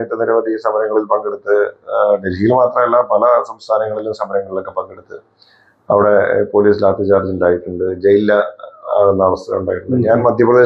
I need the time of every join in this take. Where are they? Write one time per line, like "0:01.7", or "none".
none